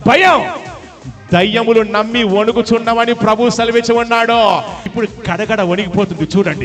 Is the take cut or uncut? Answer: cut